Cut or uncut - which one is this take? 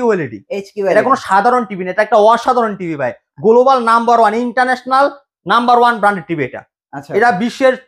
uncut